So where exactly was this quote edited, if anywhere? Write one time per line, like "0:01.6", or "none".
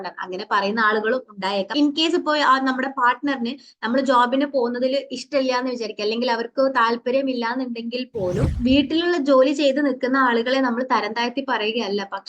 0:08.5

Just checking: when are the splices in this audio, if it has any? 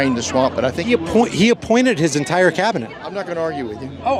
none

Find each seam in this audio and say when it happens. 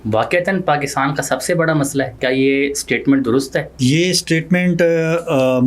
0:02.1
0:03.7

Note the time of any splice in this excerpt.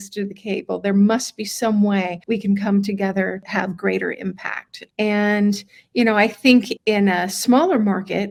none

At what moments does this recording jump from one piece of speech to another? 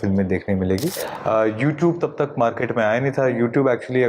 0:01.1

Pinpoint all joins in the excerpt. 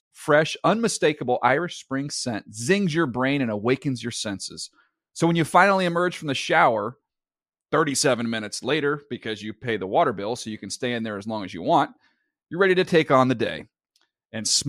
none

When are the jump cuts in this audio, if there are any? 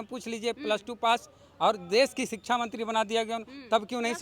none

